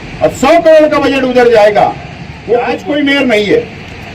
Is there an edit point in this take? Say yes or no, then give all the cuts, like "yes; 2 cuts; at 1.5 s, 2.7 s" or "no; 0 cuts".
yes; 1 cut; at 2.7 s